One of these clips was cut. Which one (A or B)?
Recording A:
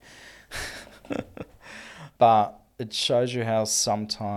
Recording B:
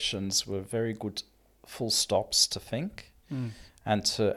A